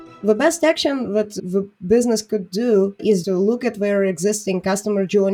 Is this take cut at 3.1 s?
yes; 2 cuts; at 1.3 s, 3.1 s

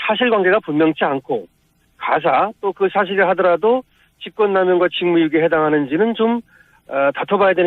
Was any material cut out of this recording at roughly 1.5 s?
no; 1 cut; at 5.3 s

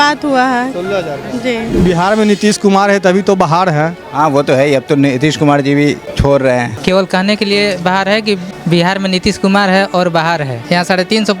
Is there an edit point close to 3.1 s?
no; 5 cuts; at 1.8 s, 6.1 s, 6.7 s, 8.5 s, 10.6 s

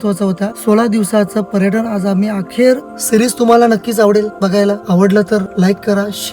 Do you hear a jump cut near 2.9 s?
yes; 2 cuts; at 2.9 s, 4.8 s

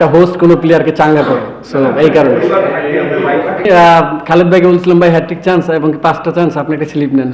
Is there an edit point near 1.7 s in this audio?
no; 1 cut; at 3.5 s

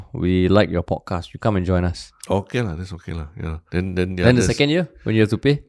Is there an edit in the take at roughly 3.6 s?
yes; 2 cuts; at 2.1 s, 3.6 s

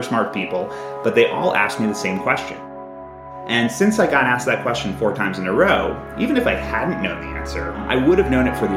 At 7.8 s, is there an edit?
yes; 2 cuts; at 2.9 s, 7.8 s

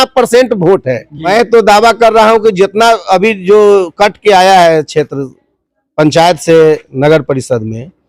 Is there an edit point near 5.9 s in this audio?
no; 1 cut; at 1.3 s

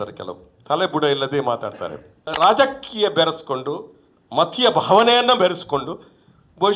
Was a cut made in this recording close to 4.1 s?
no; 1 cut; at 2.2 s

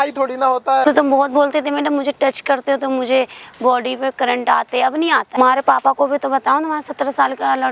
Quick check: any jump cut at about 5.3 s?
yes; 2 cuts; at 0.8 s, 5.3 s

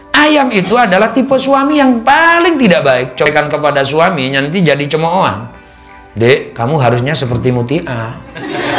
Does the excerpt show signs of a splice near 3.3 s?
yes; 1 cut; at 3.3 s

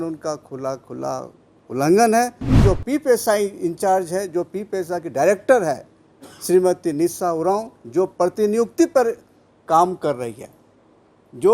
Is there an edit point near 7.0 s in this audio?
no; 1 cut; at 2.6 s

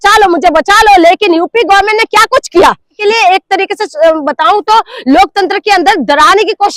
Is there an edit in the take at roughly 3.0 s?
yes; 1 cut; at 3.0 s

